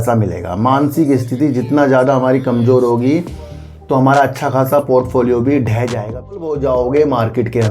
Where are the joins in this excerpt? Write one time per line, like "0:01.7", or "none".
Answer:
0:06.4